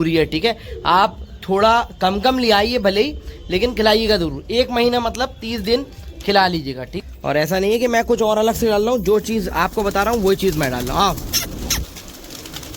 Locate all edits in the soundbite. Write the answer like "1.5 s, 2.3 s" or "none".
6.9 s